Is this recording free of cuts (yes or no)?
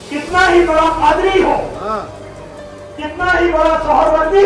yes